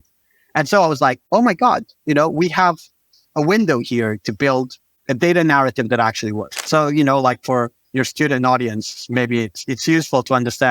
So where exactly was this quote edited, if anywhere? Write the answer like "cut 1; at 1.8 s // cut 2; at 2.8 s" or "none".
cut 1; at 6.5 s // cut 2; at 7.8 s